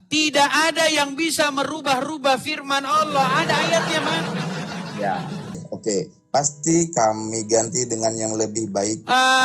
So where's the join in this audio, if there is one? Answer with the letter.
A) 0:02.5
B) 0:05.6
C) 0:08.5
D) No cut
B